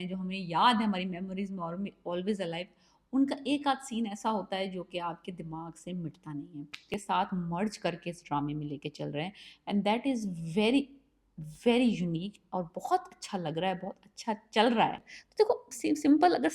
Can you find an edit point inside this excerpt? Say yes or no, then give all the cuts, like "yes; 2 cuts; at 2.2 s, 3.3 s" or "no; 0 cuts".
yes; 2 cuts; at 6.9 s, 15.2 s